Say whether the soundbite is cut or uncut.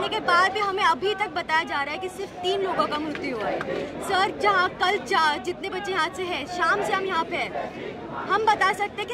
uncut